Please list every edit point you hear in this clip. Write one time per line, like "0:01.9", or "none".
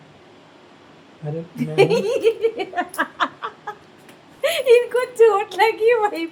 none